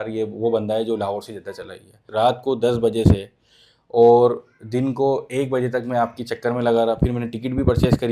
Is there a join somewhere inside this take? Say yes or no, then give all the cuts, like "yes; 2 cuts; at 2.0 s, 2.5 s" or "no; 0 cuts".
yes; 1 cut; at 2.0 s